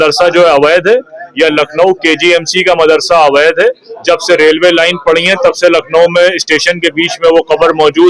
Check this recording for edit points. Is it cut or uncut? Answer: uncut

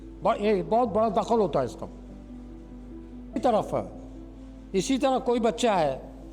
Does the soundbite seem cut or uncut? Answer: cut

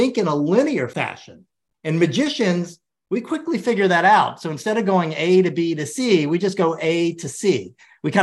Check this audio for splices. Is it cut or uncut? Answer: cut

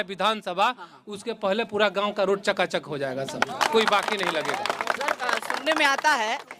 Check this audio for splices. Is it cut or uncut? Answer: uncut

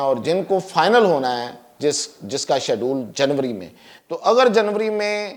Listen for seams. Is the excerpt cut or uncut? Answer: uncut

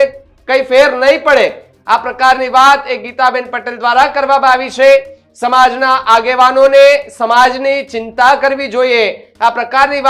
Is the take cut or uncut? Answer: uncut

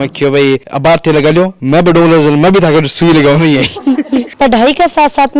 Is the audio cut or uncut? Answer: cut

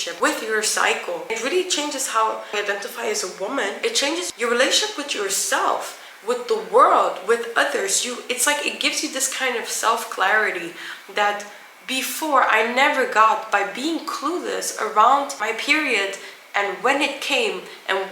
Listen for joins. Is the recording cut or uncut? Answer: cut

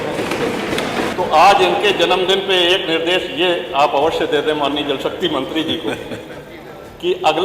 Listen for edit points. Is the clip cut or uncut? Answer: cut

